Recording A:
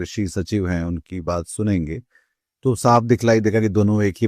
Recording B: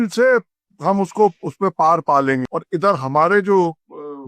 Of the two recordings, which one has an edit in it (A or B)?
B